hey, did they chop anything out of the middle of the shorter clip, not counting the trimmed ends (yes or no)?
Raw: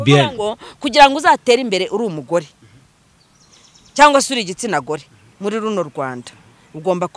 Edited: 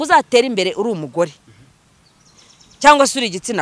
no